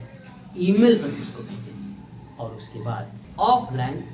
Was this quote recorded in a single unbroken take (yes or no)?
no